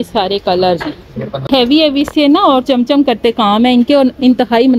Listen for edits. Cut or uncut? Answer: cut